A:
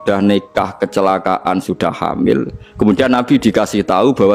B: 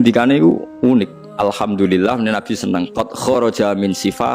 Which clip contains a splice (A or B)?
B